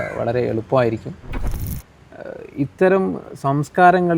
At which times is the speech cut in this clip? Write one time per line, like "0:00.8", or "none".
0:01.6

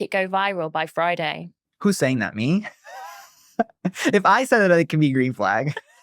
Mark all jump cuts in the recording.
none

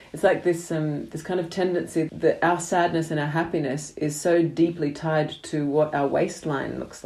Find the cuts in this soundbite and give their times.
0:02.1

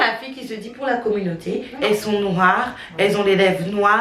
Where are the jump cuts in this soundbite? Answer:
0:01.7

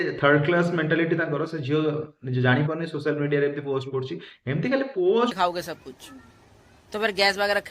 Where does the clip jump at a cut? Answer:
0:05.3

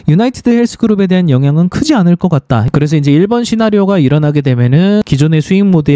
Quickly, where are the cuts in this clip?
0:02.6
0:05.0

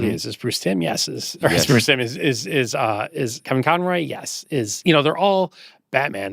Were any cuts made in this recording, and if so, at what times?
none

